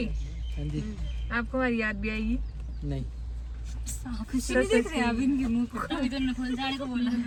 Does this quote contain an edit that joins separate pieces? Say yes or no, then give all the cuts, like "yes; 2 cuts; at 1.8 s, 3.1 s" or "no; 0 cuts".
no; 0 cuts